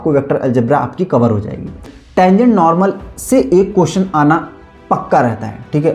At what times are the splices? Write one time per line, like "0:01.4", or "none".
0:02.0